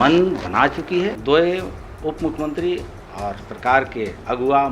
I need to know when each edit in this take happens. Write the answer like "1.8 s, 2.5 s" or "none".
1.2 s